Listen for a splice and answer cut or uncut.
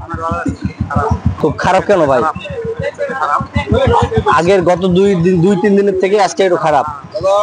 cut